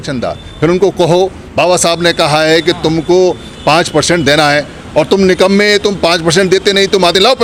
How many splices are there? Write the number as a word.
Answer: zero